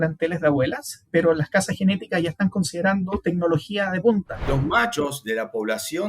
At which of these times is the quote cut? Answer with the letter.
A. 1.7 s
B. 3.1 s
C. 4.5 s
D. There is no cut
C